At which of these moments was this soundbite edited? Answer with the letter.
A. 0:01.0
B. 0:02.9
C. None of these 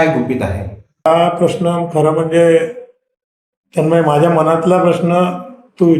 A